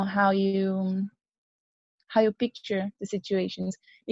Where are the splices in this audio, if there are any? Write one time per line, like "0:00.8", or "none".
none